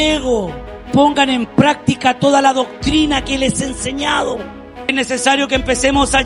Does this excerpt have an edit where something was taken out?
yes; 2 cuts; at 0.9 s, 4.9 s

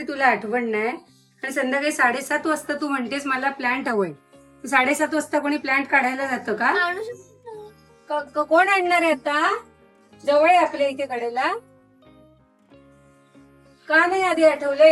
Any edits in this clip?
no; 0 cuts

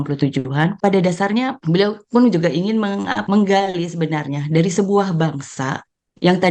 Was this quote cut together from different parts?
yes; 3 cuts; at 0.8 s, 1.6 s, 3.2 s

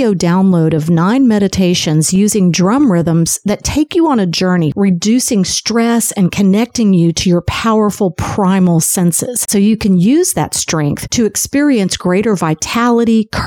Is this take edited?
yes; 2 cuts; at 4.7 s, 9.4 s

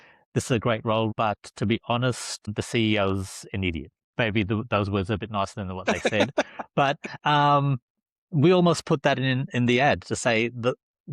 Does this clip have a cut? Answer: yes; 1 cut; at 1.1 s

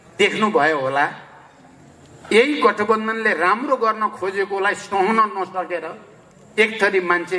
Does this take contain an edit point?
no; 0 cuts

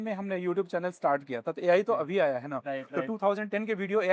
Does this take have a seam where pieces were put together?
no; 0 cuts

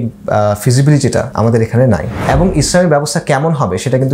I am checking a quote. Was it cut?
yes; 2 cuts; at 1.3 s, 2.1 s

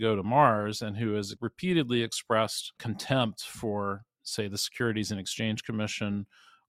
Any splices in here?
yes; 2 cuts; at 1.4 s, 2.8 s

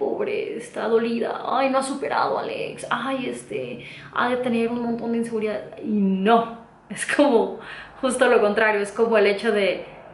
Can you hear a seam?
no; 0 cuts

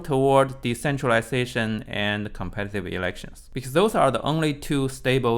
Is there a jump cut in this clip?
yes; 1 cut; at 3.3 s

